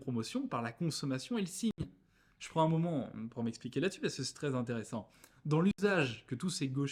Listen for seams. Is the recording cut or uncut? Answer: uncut